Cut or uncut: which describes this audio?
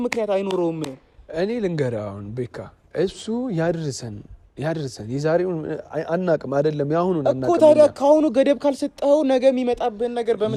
uncut